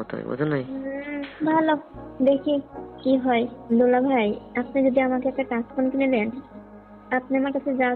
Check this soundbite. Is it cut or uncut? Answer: cut